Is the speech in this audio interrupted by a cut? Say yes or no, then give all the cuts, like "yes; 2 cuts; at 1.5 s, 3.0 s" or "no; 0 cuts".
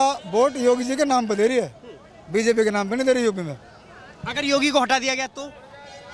no; 0 cuts